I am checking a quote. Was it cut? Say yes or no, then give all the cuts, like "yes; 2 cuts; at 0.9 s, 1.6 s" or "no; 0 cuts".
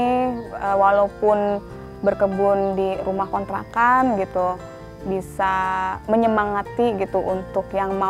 no; 0 cuts